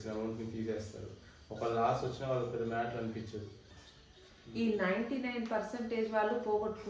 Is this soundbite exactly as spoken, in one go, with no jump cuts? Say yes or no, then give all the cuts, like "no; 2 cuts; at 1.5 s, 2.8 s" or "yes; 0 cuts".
yes; 0 cuts